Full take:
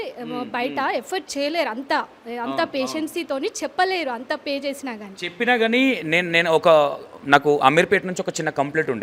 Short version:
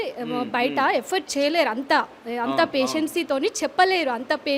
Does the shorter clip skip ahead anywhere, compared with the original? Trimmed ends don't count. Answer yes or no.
no